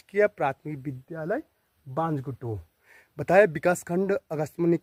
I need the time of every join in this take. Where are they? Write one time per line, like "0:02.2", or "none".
none